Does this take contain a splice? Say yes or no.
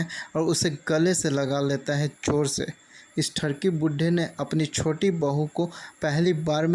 no